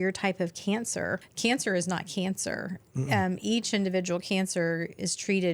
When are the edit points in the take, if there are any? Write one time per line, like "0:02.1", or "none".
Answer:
0:01.2